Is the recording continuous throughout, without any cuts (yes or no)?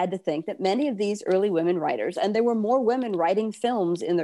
yes